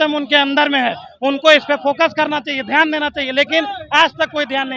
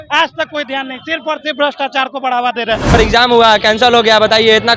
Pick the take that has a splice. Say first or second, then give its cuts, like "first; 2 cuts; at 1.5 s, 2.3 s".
second; 1 cut; at 2.9 s